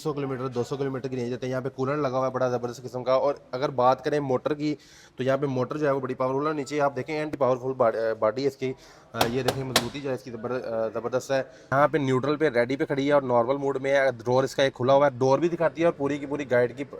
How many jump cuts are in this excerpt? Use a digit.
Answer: 2